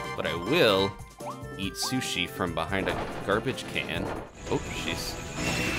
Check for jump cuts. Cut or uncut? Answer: cut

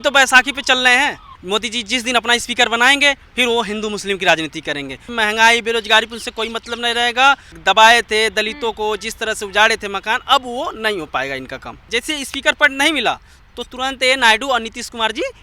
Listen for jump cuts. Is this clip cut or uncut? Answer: cut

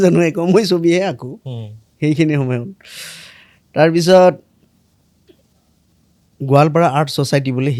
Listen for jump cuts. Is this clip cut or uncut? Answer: uncut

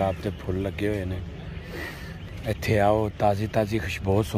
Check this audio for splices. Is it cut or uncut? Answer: uncut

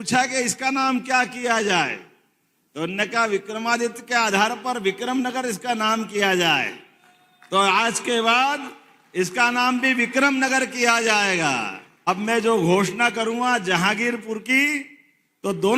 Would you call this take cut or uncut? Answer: cut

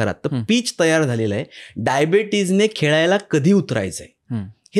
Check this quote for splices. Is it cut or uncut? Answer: uncut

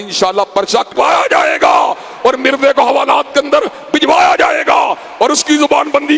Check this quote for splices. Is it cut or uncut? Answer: cut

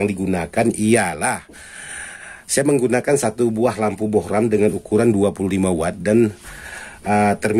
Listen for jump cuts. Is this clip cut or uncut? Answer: uncut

